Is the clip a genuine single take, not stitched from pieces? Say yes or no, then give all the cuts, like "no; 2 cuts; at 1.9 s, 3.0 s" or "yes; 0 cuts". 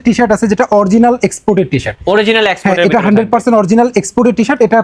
yes; 0 cuts